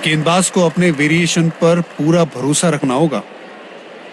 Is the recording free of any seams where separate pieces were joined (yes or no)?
no